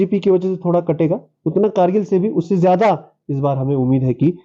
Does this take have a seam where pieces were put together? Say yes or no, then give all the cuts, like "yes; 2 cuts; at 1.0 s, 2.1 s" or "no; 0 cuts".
no; 0 cuts